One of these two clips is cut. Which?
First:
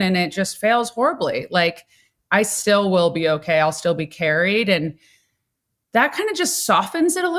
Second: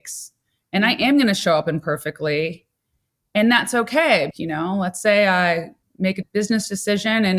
second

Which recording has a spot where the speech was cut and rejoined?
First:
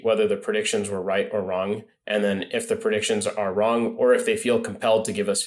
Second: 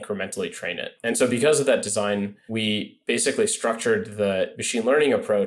second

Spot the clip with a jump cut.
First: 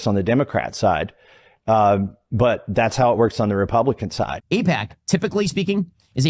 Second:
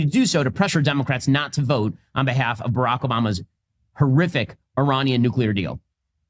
first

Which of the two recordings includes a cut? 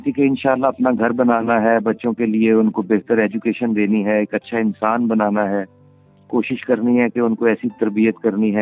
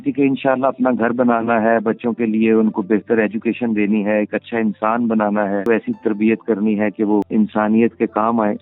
second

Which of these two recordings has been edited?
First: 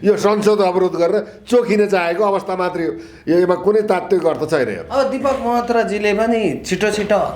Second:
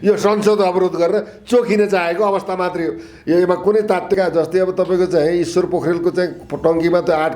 second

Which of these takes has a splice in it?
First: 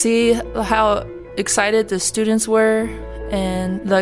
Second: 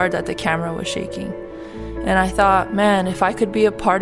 second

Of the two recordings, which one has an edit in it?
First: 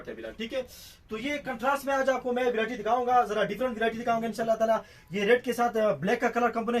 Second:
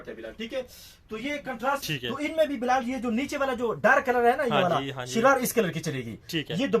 second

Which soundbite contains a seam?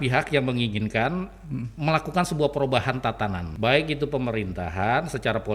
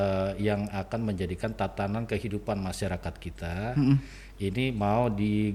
first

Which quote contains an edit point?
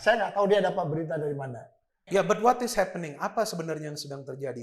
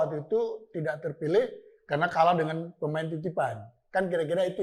first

